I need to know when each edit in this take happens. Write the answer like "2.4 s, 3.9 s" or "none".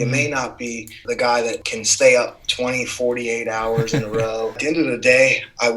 1.0 s, 1.7 s, 4.6 s